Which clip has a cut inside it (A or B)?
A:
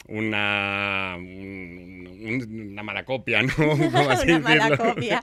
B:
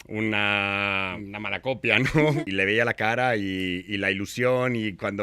B